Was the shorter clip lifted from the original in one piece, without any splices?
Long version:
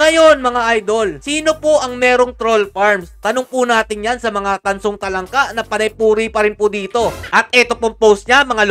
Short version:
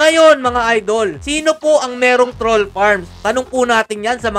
yes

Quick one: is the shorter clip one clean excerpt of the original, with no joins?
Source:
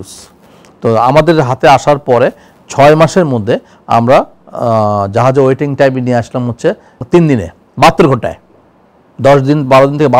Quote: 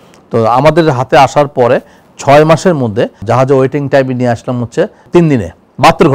no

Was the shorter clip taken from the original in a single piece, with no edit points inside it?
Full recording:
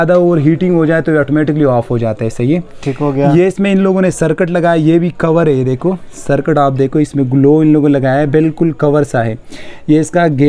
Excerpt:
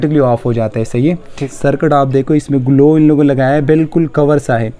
no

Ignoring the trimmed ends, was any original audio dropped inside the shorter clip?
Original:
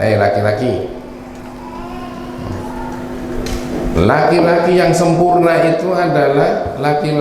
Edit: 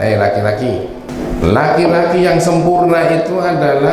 yes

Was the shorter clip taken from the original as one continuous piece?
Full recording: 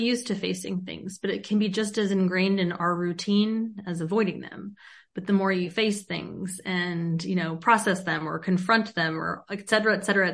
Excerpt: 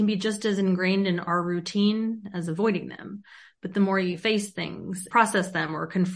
no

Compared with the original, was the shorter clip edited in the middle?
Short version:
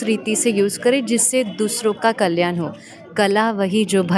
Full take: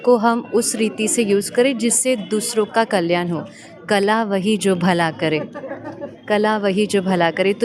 no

